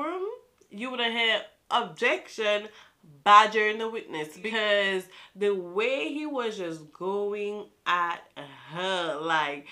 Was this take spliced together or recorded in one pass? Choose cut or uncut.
uncut